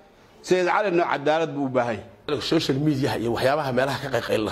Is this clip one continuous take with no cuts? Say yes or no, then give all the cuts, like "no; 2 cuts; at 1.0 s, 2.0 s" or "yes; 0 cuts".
no; 1 cut; at 2.3 s